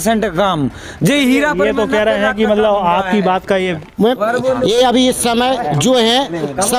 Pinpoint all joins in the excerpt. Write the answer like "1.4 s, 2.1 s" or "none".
none